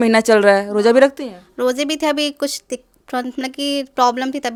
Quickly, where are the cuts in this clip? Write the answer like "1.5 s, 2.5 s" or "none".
none